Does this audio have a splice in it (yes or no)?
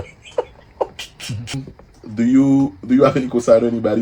no